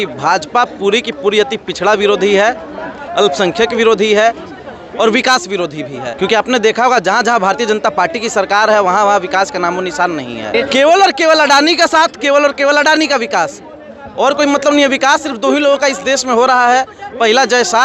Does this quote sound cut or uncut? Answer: cut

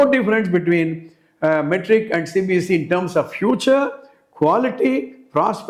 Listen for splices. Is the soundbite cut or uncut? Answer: uncut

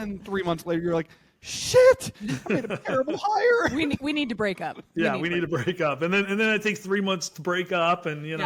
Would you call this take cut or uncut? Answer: uncut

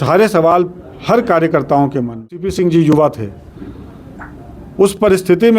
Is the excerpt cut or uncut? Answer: cut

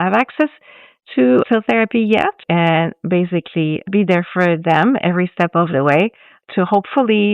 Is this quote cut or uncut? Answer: cut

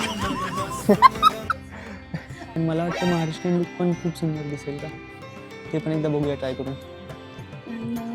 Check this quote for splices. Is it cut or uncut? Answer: cut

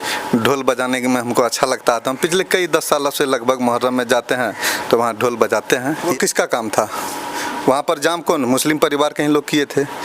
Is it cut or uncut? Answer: cut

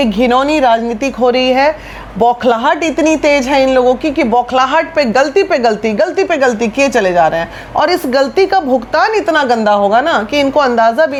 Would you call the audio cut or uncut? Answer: uncut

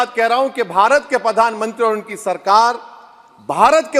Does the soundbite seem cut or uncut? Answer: uncut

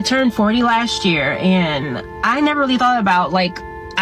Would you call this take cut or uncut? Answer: uncut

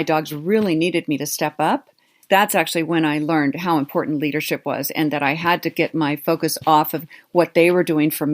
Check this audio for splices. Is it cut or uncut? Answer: cut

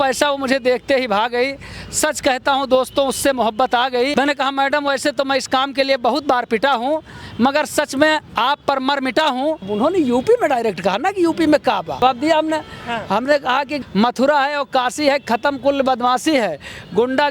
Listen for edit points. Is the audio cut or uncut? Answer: cut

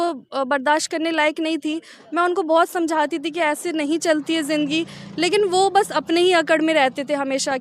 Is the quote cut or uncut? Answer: uncut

